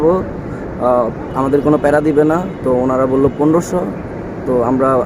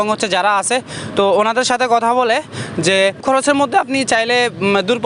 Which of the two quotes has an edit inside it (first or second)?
second